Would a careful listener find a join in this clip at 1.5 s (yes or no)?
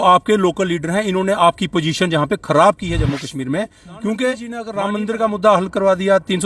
no